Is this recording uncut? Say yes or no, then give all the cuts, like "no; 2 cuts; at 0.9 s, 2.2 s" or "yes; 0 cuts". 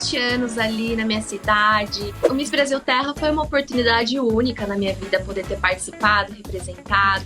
no; 1 cut; at 2.2 s